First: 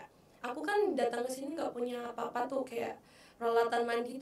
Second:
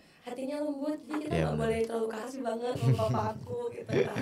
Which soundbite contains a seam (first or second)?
second